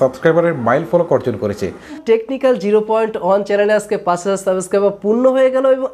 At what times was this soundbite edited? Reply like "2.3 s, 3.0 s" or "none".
2.0 s